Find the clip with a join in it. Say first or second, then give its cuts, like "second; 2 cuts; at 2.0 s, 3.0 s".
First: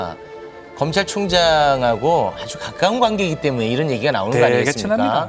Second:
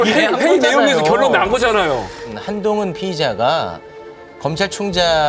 second; 1 cut; at 2.4 s